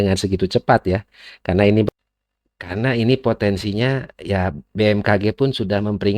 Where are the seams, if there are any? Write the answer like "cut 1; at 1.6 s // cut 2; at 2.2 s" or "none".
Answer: cut 1; at 1.9 s